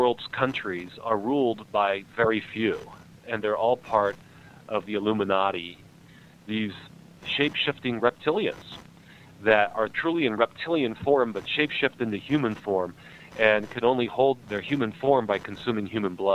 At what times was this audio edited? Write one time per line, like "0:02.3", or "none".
0:03.2
0:04.8
0:06.0
0:07.2
0:10.0
0:14.4